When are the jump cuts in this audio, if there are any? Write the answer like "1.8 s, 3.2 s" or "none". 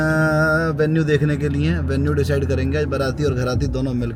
none